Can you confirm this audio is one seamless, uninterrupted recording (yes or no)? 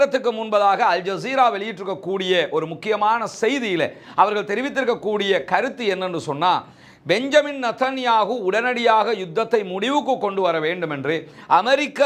yes